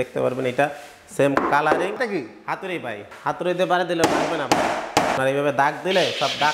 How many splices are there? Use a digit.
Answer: 3